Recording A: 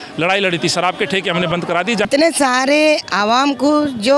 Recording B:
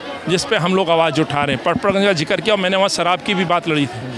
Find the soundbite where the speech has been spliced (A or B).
A